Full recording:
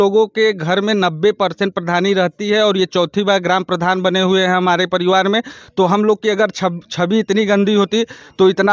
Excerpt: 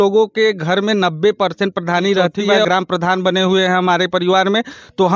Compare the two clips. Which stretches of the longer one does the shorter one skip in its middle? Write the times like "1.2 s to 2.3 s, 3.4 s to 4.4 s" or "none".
2.6 s to 3.4 s